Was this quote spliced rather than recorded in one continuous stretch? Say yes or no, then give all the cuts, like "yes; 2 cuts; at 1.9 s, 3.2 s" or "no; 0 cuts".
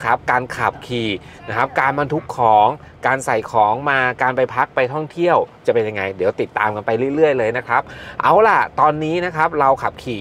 no; 0 cuts